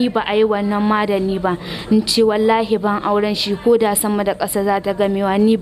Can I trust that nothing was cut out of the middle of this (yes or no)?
yes